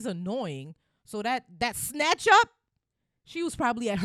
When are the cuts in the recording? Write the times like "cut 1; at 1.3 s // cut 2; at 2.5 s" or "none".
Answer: none